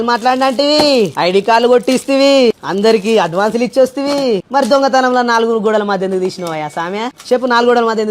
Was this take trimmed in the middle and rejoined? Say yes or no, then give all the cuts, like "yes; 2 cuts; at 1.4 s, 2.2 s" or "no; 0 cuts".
yes; 1 cut; at 1.1 s